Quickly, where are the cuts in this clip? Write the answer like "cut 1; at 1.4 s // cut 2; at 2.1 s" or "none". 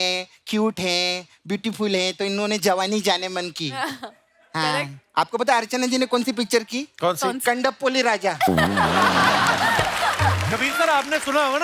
cut 1; at 10.5 s